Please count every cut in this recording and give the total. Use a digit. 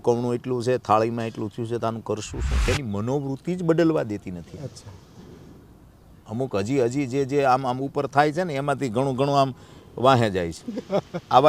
1